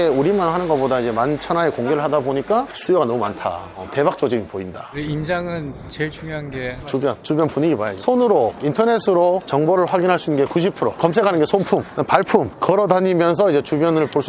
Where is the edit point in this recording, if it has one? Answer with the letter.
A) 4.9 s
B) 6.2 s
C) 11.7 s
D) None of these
A